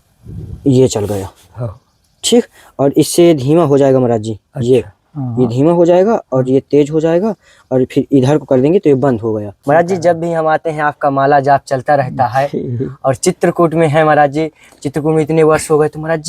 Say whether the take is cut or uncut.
cut